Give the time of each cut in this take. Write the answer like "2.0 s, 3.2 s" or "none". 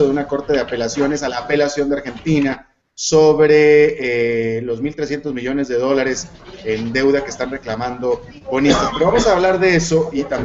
5.5 s